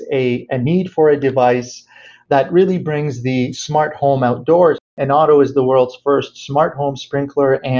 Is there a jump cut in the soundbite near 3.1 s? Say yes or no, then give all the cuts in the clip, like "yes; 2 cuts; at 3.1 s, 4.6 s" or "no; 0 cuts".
no; 1 cut; at 4.9 s